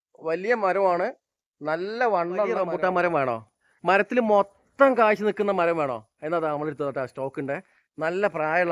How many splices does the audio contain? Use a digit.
1